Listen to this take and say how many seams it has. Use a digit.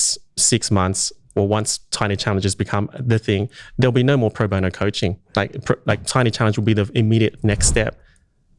2